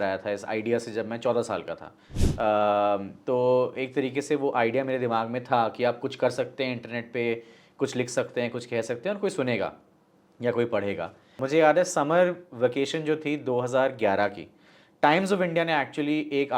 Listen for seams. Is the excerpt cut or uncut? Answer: cut